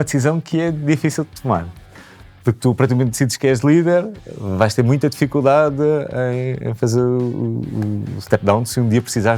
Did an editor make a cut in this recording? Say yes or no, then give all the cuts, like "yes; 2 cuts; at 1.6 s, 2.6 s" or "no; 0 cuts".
no; 0 cuts